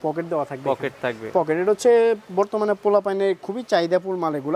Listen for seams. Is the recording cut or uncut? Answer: uncut